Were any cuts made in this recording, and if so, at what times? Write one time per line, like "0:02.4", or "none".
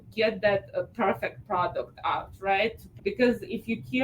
0:02.9